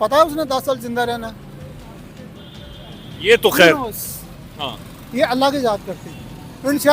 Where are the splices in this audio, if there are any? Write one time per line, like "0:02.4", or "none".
none